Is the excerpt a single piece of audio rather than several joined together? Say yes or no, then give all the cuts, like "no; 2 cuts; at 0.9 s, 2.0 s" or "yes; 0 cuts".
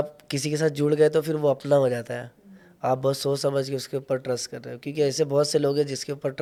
yes; 0 cuts